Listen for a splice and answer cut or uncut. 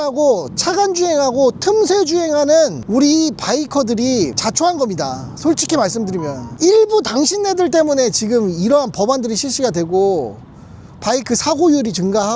cut